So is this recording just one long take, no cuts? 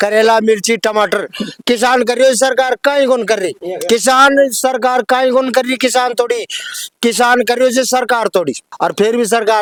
yes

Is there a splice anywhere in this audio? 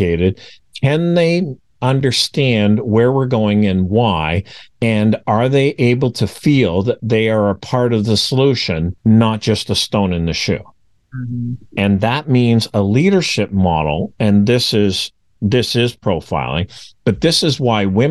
no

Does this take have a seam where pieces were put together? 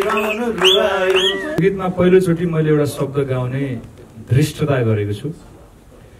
yes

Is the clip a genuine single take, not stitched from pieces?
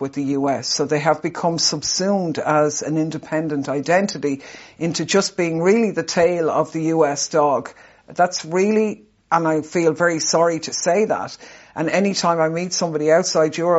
yes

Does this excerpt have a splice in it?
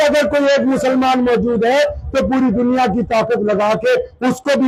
no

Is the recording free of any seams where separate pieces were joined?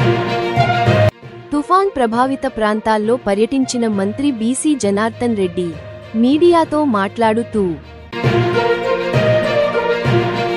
yes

